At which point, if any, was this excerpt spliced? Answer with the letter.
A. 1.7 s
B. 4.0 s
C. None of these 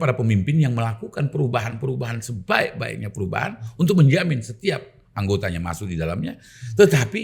C